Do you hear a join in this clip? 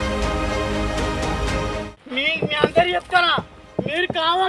yes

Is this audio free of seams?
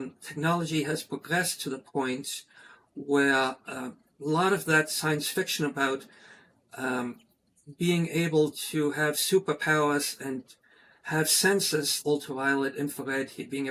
no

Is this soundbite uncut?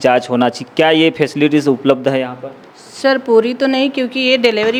yes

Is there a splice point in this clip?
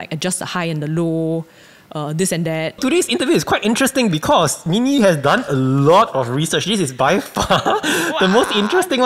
yes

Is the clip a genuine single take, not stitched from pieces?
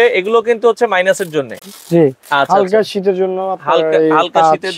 yes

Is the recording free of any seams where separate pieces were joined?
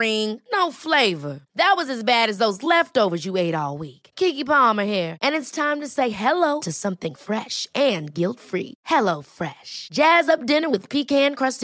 yes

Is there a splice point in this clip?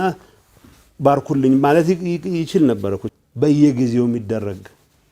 yes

